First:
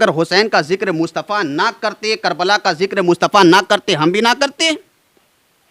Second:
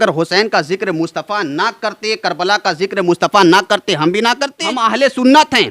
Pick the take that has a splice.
second; 1 cut; at 4.7 s

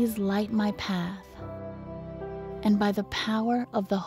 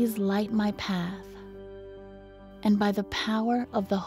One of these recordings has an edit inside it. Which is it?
second; 2 cuts; at 1.2 s, 2.6 s

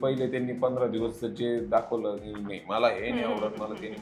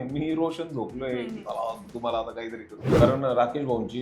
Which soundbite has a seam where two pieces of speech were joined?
second; 1 cut; at 2.8 s

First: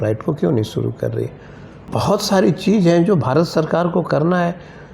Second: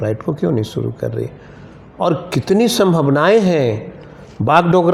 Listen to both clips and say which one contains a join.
first; 1 cut; at 1.9 s

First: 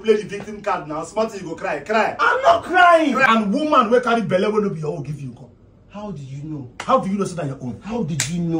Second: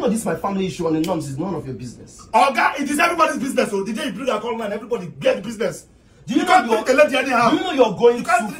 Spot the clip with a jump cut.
first; 1 cut; at 3.2 s

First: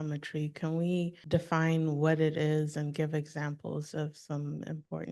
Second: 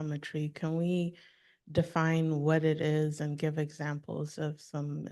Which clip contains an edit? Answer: first; 1 cut; at 1.2 s

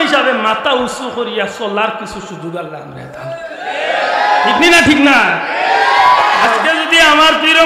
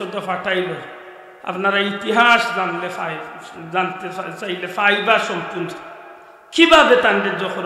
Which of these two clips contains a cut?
first; 1 cut; at 6.5 s

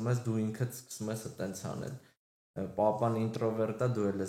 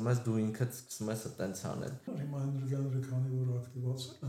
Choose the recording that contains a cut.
second; 1 cut; at 2.1 s

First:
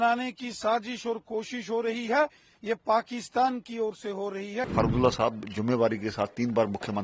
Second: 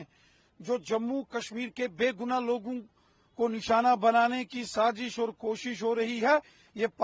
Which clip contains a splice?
first; 1 cut; at 4.6 s

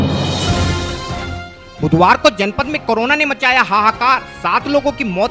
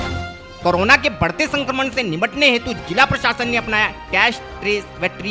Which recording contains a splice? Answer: first; 1 cut; at 1.5 s

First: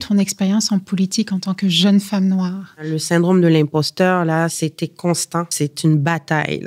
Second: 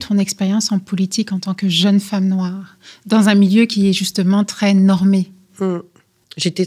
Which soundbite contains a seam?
first; 2 cuts; at 2.9 s, 5.5 s

